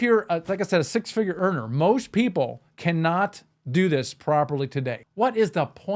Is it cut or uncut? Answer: cut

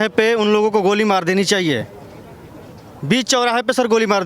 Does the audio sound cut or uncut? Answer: uncut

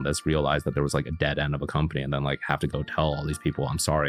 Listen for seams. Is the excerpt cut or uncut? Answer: uncut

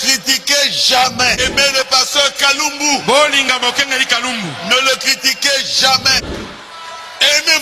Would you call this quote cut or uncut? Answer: cut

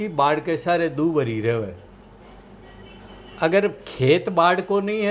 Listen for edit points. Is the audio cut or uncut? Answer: uncut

